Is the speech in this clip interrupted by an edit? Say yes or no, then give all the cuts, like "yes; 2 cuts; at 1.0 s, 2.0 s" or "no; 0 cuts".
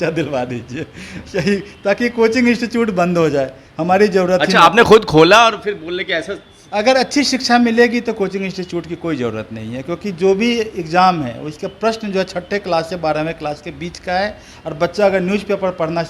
no; 0 cuts